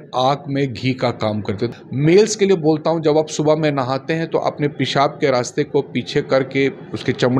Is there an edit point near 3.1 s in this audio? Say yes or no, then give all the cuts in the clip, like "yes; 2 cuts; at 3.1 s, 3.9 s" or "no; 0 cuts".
no; 1 cut; at 1.7 s